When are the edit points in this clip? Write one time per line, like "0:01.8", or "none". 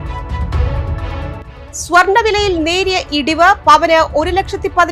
0:01.5